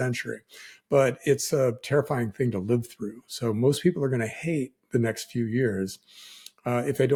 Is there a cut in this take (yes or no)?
no